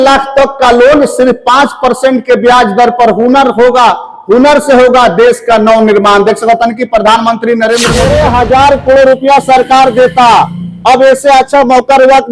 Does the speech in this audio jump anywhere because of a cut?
yes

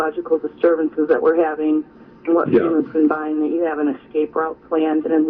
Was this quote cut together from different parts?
no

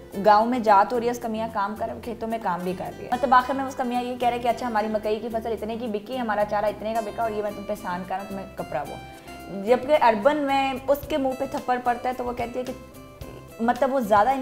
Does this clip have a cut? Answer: yes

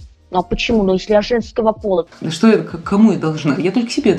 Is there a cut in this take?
yes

